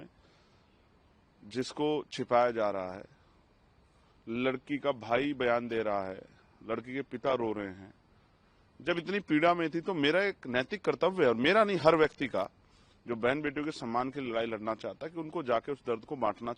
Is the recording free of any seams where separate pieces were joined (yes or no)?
yes